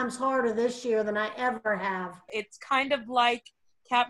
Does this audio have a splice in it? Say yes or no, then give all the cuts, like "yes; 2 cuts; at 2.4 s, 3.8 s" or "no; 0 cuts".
yes; 1 cut; at 2.2 s